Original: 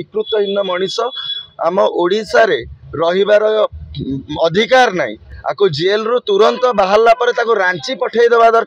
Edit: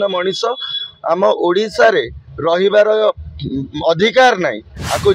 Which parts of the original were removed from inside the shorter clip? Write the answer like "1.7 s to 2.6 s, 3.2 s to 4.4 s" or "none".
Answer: none